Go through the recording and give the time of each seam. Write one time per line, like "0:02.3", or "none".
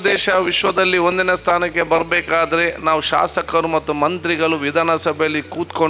none